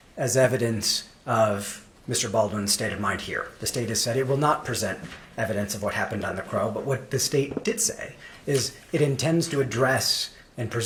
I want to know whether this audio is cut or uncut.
uncut